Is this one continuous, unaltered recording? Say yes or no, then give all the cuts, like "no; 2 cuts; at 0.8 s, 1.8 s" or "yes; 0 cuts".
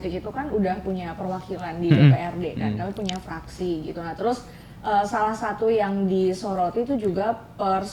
yes; 0 cuts